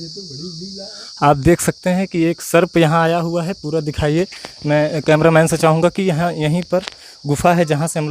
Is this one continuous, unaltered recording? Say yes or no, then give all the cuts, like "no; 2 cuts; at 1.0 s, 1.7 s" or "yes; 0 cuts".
yes; 0 cuts